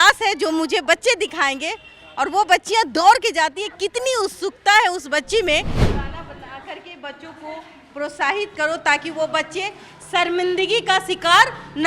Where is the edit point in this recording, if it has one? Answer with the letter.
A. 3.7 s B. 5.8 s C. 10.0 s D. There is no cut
B